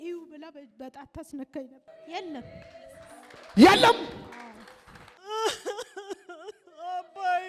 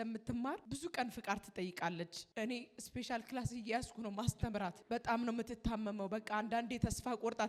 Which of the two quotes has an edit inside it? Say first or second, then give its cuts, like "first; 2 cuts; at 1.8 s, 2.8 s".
first; 1 cut; at 1.9 s